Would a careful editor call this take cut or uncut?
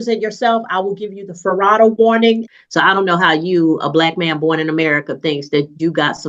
cut